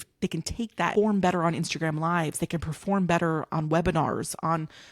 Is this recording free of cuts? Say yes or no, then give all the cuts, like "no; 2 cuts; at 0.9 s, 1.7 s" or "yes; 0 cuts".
no; 1 cut; at 0.9 s